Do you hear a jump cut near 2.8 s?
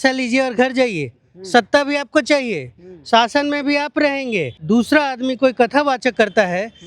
no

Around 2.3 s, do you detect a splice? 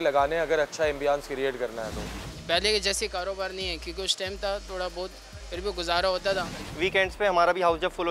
yes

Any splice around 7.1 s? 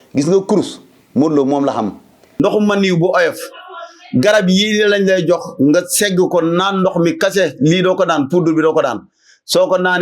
no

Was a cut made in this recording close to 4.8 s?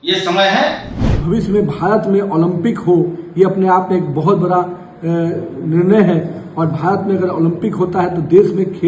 no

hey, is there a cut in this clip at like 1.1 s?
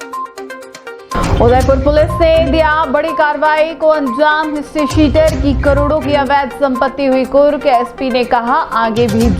yes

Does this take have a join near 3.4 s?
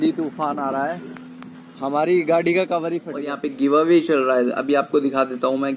yes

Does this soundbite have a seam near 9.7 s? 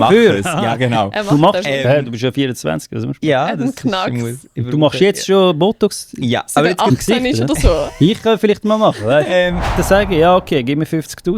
yes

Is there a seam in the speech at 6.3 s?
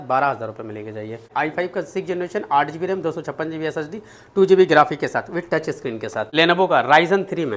yes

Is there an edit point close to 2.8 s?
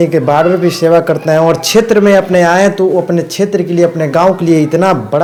no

